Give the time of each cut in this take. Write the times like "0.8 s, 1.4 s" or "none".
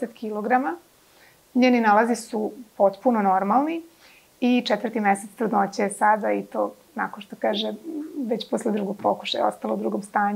none

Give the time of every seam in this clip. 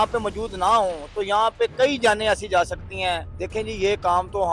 3.3 s

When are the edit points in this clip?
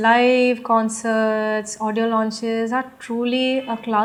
none

